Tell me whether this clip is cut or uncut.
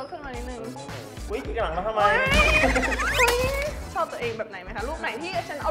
cut